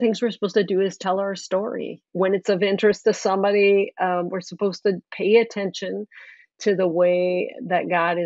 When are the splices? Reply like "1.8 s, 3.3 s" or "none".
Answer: 2.0 s